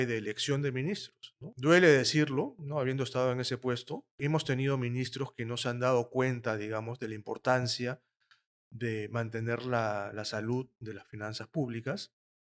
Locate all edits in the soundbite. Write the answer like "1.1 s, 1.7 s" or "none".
4.2 s